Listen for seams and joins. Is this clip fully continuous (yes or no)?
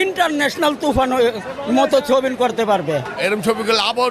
no